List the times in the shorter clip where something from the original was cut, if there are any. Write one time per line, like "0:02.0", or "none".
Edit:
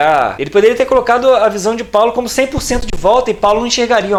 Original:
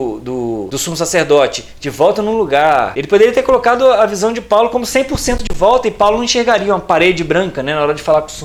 none